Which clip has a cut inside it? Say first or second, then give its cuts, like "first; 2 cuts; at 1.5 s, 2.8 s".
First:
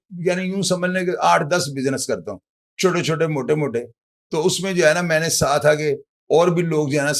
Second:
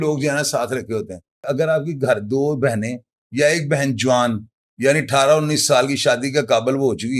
second; 1 cut; at 1.5 s